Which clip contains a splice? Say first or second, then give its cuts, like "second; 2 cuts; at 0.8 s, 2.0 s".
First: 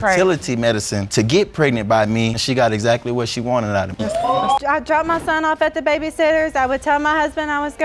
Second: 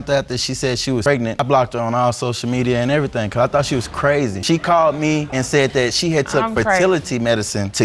first; 1 cut; at 4.6 s